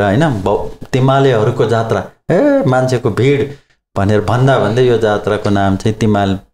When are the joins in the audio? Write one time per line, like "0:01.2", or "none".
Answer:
none